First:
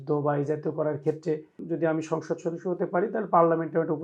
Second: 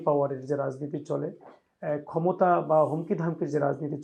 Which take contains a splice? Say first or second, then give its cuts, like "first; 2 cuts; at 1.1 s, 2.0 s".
first; 1 cut; at 1.6 s